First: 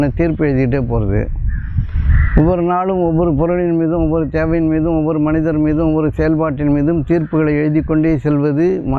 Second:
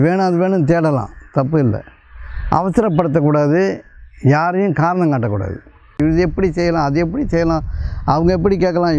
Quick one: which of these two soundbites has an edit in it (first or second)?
second